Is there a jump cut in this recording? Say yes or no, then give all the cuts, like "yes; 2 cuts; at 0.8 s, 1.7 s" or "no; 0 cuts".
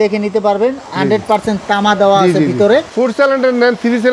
yes; 1 cut; at 2.9 s